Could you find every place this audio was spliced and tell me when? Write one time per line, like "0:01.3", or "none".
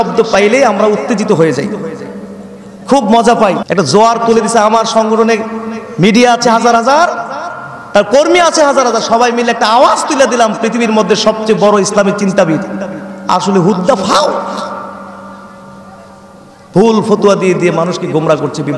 0:03.6